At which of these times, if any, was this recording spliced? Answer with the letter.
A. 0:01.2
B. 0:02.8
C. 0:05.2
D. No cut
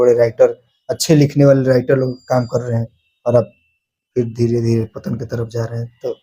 D